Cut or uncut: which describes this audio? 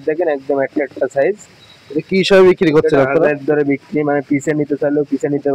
uncut